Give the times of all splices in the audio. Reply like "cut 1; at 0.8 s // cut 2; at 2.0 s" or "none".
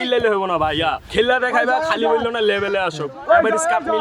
cut 1; at 1.0 s